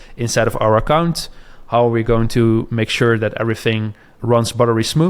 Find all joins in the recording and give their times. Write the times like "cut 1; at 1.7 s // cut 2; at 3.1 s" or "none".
none